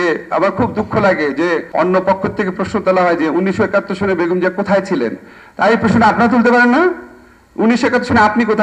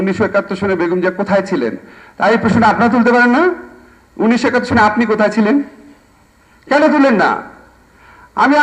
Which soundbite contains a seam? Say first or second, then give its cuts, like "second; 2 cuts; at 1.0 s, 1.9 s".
first; 1 cut; at 1.7 s